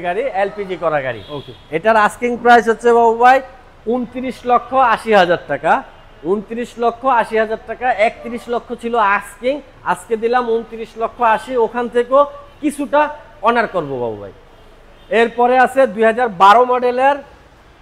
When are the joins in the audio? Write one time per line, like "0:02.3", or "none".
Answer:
none